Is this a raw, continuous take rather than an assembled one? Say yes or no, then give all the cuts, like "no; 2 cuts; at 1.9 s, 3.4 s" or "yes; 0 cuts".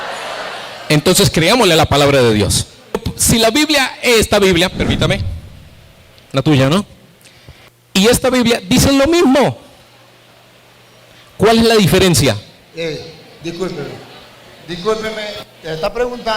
no; 1 cut; at 3.1 s